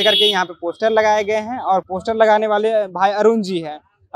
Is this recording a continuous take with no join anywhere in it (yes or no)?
yes